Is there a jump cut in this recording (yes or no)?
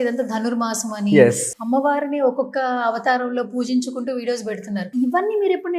yes